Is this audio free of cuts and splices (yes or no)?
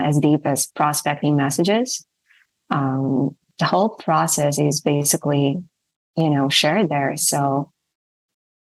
yes